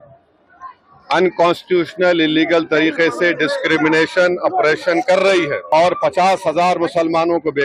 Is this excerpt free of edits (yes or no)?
no